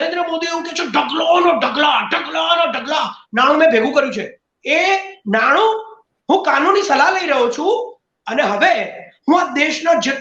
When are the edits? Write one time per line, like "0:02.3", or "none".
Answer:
none